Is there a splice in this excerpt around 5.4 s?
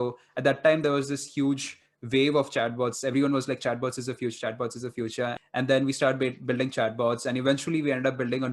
yes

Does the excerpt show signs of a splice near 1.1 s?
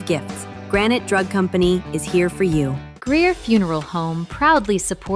no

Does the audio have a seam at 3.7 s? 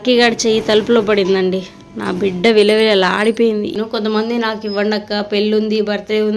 yes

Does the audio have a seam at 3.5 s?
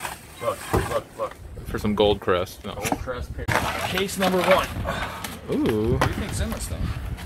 yes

